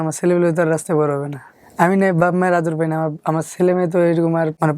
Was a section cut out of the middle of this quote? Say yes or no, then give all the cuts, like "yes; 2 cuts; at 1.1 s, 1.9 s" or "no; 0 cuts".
yes; 1 cut; at 1.5 s